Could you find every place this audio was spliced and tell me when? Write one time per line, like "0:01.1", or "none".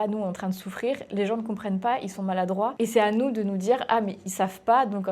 0:02.7